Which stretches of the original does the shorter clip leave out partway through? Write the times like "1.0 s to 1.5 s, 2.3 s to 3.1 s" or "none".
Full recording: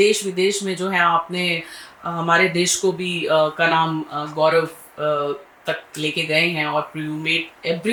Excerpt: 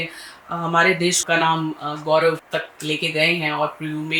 2.8 s to 3.5 s, 4.7 s to 5.6 s